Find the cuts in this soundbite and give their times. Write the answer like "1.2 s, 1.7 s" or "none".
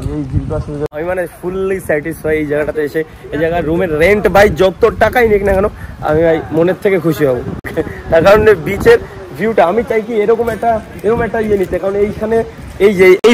0.9 s